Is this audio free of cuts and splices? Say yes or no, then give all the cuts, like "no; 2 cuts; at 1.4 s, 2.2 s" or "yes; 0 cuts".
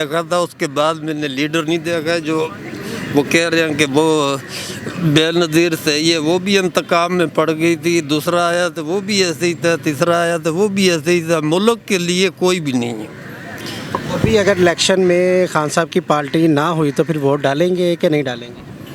yes; 0 cuts